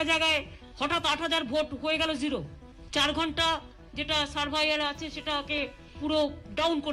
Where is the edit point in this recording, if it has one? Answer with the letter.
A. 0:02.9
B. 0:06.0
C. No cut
B